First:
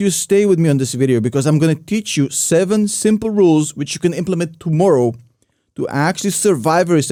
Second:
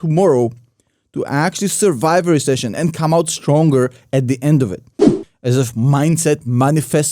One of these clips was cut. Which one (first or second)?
second